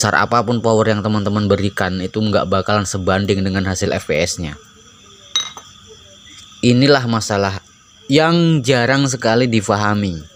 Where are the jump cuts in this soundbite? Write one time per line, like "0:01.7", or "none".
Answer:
none